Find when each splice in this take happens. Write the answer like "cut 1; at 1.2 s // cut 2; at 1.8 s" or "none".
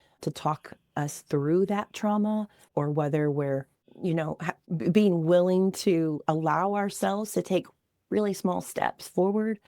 cut 1; at 2.6 s // cut 2; at 3.8 s // cut 3; at 4.5 s

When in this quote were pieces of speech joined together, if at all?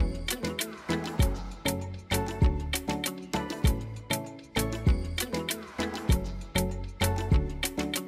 none

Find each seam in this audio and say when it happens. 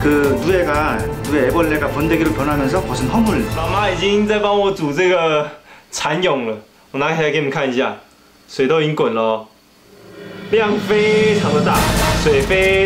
cut 1; at 3.6 s

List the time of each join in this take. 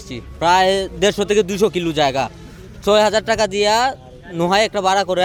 none

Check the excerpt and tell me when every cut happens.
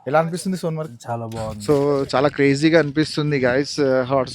cut 1; at 1.6 s

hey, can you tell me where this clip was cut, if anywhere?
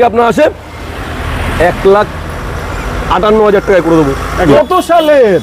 cut 1; at 4.5 s

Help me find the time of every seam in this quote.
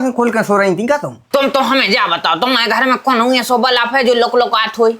cut 1; at 1.1 s

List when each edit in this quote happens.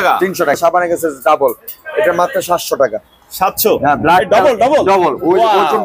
none

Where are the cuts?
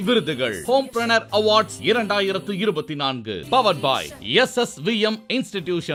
none

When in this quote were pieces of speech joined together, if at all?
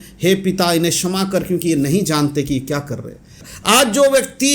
cut 1; at 3.4 s

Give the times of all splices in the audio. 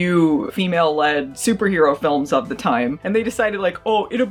none

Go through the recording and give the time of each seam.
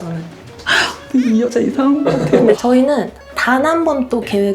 cut 1; at 2.6 s

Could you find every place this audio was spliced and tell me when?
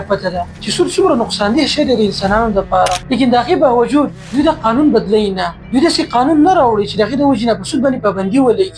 cut 1; at 3.0 s

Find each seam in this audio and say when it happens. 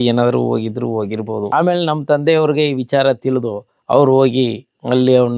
cut 1; at 1.5 s

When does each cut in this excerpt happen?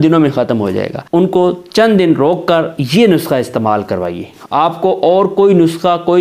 cut 1; at 0.9 s

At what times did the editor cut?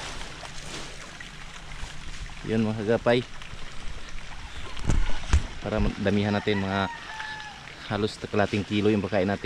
none

